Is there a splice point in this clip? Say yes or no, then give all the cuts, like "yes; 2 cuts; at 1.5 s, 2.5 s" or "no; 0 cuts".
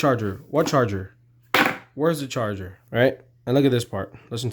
yes; 1 cut; at 2.7 s